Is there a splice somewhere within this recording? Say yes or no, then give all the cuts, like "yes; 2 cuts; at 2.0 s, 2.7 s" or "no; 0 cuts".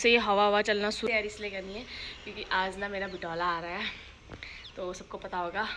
yes; 1 cut; at 1.0 s